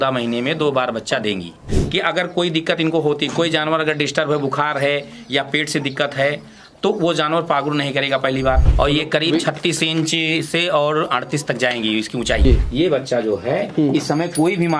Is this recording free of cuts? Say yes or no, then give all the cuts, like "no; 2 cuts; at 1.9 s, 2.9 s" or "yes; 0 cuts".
no; 3 cuts; at 1.6 s, 8.7 s, 12.4 s